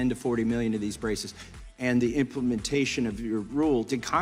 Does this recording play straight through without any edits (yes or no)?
yes